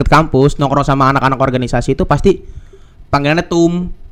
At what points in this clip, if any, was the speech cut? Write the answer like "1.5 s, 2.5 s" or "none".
none